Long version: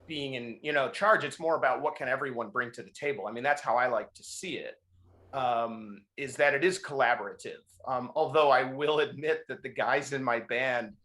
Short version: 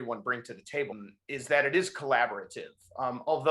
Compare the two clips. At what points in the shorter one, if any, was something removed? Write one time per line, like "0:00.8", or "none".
0:00.9